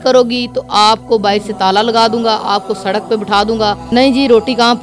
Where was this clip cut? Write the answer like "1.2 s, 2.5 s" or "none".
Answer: 3.8 s